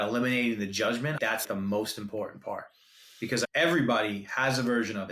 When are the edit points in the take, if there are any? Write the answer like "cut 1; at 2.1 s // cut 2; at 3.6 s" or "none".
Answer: cut 1; at 1.4 s // cut 2; at 3.4 s